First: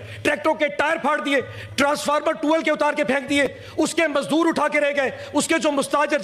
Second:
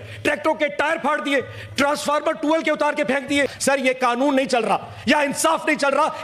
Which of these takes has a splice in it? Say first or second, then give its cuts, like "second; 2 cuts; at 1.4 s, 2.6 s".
second; 1 cut; at 3.5 s